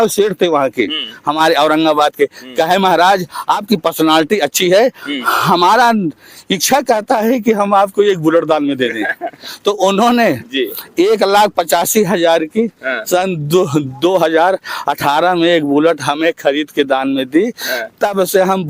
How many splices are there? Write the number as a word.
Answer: zero